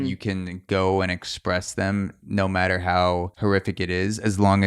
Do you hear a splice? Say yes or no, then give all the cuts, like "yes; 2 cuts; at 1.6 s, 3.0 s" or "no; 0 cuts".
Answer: yes; 1 cut; at 3.3 s